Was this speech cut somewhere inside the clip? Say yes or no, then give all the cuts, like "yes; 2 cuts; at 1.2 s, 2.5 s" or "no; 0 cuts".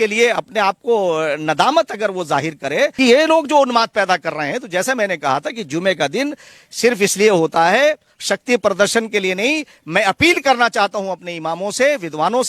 yes; 1 cut; at 2.9 s